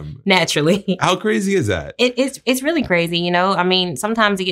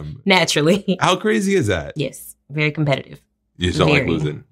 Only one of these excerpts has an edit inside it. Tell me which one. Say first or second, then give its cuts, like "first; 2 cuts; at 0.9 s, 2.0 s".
second; 1 cut; at 1.9 s